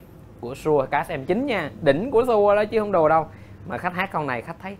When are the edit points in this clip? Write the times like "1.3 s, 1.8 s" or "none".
none